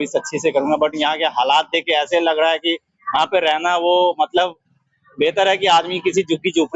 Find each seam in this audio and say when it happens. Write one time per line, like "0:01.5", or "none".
none